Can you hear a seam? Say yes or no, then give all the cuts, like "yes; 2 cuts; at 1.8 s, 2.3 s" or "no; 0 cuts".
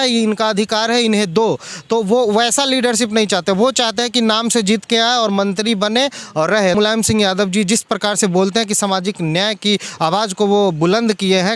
yes; 1 cut; at 6.8 s